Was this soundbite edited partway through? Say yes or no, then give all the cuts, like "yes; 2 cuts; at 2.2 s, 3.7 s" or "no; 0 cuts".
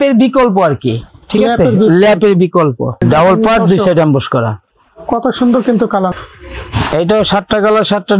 yes; 2 cuts; at 3.0 s, 6.1 s